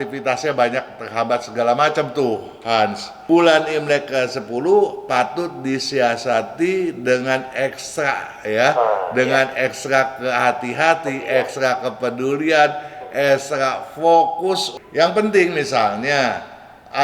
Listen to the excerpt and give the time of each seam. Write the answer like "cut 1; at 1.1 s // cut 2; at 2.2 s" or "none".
cut 1; at 3.1 s // cut 2; at 14.7 s